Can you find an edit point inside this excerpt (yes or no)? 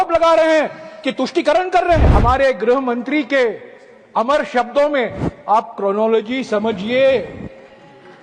yes